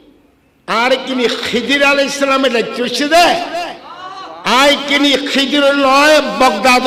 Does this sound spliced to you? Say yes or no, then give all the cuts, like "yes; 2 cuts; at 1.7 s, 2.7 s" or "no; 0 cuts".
no; 0 cuts